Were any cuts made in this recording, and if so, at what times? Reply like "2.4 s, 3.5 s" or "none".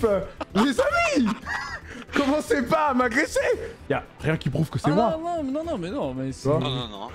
3.7 s